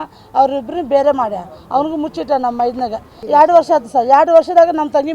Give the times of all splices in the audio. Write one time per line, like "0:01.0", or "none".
0:03.2